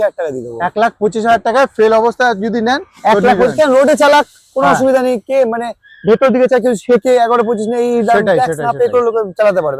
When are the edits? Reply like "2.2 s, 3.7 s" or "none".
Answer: none